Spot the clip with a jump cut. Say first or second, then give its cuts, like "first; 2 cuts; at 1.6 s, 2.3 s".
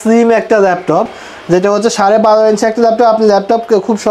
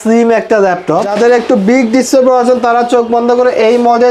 second; 1 cut; at 1.1 s